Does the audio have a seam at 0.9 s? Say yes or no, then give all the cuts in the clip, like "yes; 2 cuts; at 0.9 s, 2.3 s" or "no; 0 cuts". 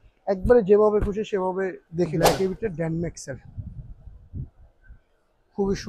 no; 1 cut; at 2.2 s